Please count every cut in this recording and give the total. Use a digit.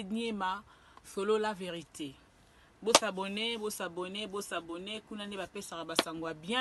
0